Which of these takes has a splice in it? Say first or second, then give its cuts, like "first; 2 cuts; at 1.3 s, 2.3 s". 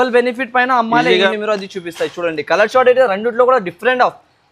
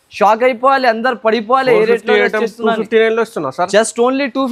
first; 1 cut; at 1.3 s